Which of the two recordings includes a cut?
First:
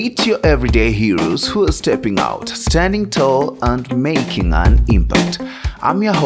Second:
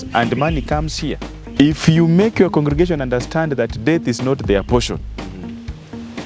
second; 1 cut; at 1.3 s

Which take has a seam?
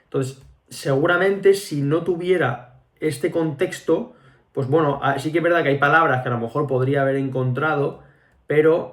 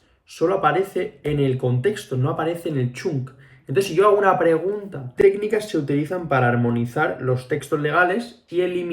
second; 1 cut; at 5.2 s

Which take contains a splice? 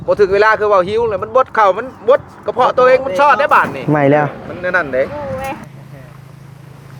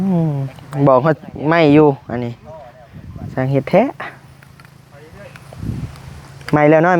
first; 3 cuts; at 3.8 s, 4.4 s, 5.1 s

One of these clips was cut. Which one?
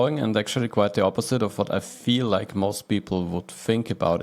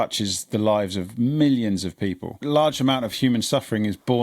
second; 1 cut; at 2.4 s

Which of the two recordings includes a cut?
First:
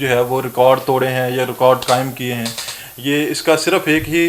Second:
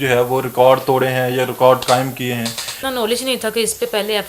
second; 1 cut; at 2.8 s

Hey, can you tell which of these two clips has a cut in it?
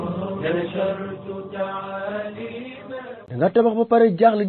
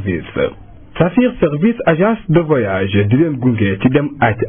first; 1 cut; at 3.3 s

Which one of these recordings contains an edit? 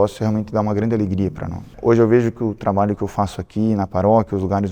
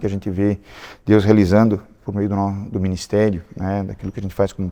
first; 1 cut; at 1.7 s

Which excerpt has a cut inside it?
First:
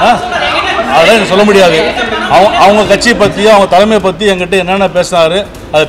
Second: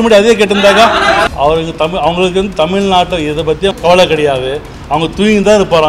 second; 2 cuts; at 1.3 s, 3.8 s

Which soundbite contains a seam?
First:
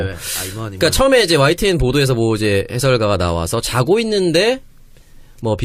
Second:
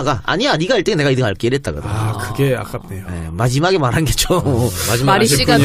second; 1 cut; at 2.2 s

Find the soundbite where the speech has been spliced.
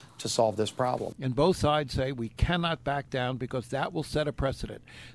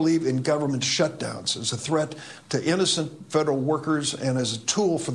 first; 1 cut; at 1.1 s

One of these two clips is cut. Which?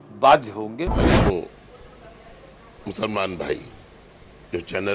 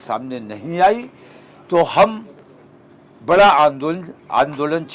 first; 1 cut; at 1.1 s

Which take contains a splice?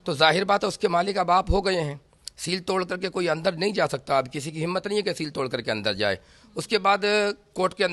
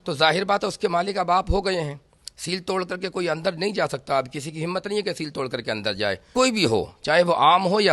second; 1 cut; at 6.2 s

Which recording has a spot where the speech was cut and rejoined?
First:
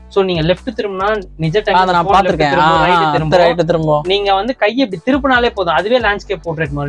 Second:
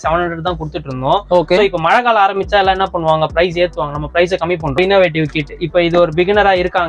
second; 1 cut; at 4.8 s

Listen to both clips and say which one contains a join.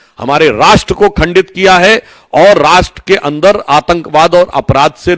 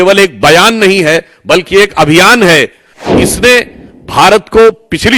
second; 1 cut; at 3.1 s

